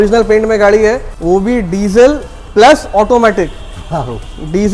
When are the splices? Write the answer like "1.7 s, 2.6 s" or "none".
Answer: 1.1 s